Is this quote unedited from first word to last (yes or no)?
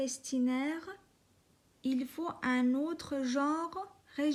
yes